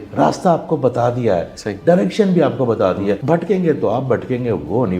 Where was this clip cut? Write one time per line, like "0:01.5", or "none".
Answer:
0:03.2